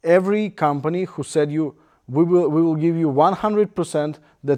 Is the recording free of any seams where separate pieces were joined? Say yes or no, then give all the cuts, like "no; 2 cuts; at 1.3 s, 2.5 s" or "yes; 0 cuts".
yes; 0 cuts